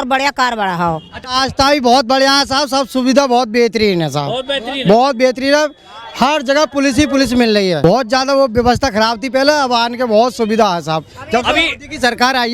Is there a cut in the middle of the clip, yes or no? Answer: yes